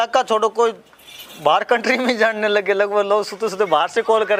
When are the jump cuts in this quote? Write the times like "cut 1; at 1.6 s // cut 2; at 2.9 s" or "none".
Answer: none